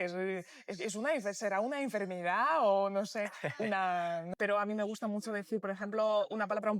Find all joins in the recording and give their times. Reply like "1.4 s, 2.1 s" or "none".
4.3 s

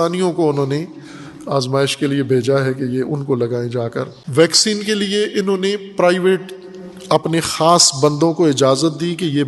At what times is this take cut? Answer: 4.2 s

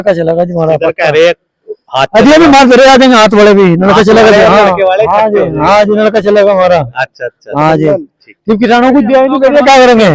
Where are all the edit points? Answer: none

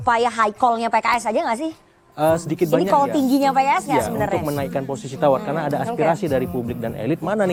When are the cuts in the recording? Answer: none

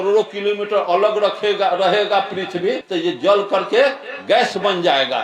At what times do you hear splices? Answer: 2.8 s

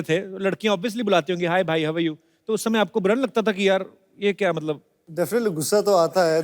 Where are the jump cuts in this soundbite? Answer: 5.0 s

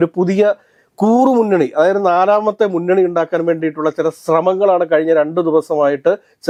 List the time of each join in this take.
none

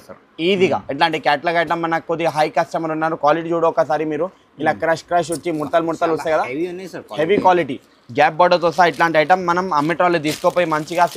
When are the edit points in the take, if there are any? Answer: none

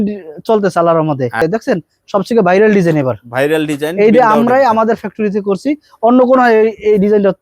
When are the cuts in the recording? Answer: 1.4 s

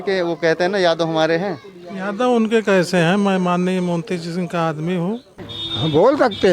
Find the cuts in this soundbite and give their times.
5.3 s

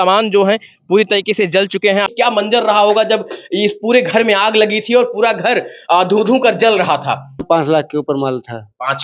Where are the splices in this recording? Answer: 2.1 s, 7.4 s

